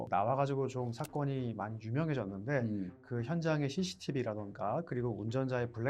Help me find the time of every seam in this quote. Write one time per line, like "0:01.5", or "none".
0:03.0